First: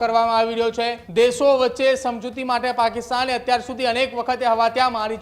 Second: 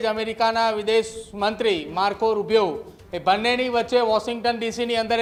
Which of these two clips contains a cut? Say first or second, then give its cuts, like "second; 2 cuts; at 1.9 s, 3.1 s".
first; 1 cut; at 1.0 s